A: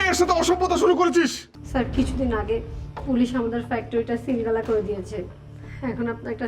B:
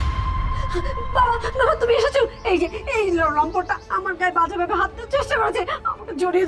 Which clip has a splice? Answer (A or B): A